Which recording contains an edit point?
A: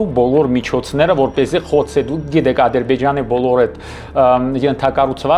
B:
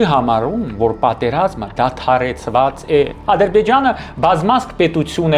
B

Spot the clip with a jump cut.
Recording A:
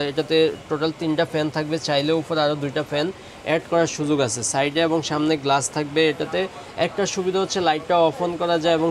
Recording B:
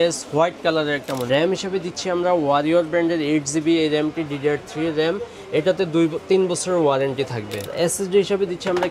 B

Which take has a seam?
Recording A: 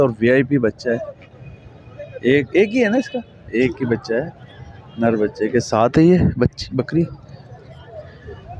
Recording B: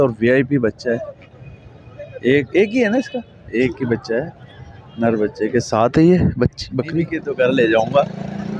B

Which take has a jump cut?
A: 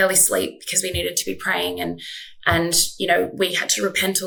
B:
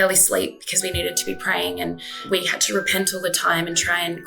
B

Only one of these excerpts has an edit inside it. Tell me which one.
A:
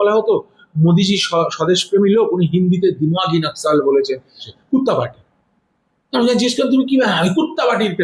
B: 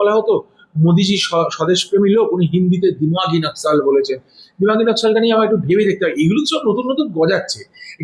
A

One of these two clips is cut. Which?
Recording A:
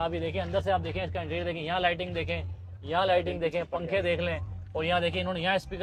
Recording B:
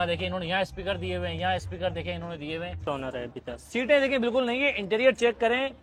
B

